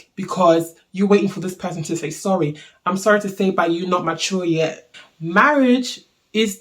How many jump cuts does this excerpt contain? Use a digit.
1